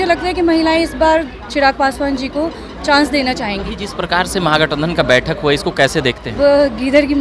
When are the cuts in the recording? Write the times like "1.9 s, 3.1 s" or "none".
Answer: 3.7 s, 6.3 s